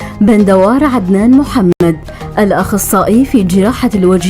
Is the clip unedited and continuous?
no; 1 cut; at 1.8 s

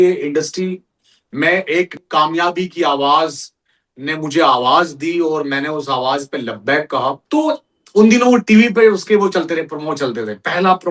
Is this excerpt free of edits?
no; 2 cuts; at 2.0 s, 7.2 s

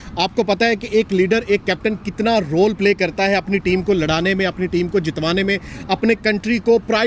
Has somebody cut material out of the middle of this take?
no; 0 cuts

